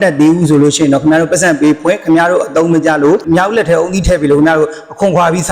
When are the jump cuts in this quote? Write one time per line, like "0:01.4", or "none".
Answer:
0:03.2